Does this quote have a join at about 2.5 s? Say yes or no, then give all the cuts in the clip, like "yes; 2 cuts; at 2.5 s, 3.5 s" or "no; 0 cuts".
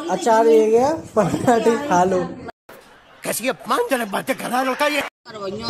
yes; 2 cuts; at 2.5 s, 4.9 s